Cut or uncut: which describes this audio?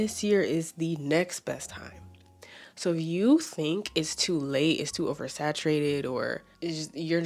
uncut